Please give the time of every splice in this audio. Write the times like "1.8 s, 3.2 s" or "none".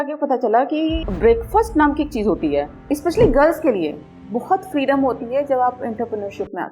1.1 s, 2.8 s